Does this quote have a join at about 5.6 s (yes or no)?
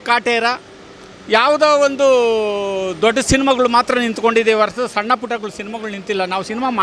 no